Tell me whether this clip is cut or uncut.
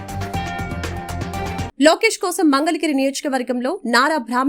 cut